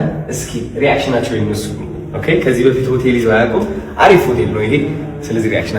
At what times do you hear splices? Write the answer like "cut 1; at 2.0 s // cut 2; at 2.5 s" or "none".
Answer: none